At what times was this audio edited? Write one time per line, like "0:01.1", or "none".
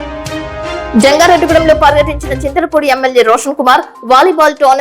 0:00.9